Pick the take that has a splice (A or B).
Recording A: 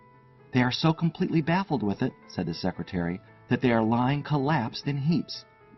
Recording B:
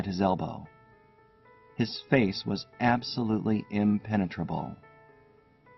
B